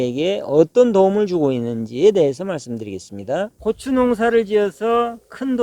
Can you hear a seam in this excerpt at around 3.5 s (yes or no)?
yes